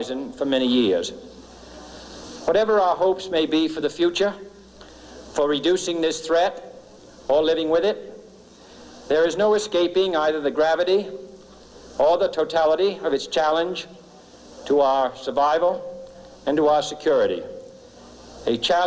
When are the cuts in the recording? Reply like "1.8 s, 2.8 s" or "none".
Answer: 2.3 s